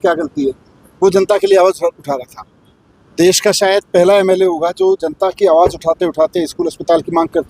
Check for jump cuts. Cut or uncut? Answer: uncut